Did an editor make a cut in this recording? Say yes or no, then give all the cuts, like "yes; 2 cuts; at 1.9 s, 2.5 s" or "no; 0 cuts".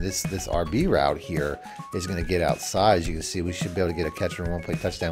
no; 0 cuts